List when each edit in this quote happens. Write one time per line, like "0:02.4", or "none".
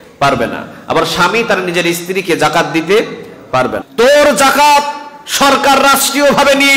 0:03.8